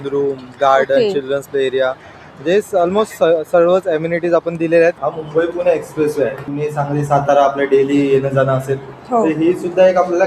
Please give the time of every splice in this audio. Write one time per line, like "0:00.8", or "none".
0:05.0
0:06.5